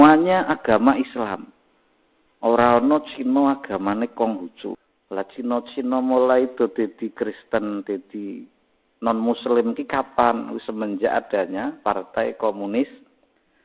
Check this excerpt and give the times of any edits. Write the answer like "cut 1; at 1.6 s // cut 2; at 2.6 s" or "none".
cut 1; at 4.8 s